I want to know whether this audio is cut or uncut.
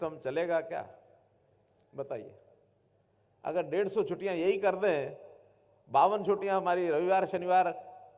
uncut